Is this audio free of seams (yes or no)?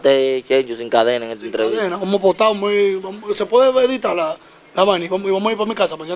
yes